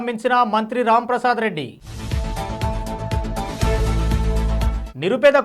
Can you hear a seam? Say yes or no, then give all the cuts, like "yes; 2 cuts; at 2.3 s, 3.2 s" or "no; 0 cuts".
no; 0 cuts